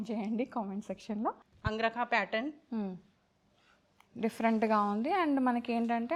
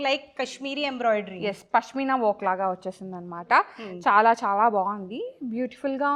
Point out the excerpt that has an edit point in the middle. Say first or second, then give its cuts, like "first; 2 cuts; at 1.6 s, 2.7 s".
first; 1 cut; at 1.5 s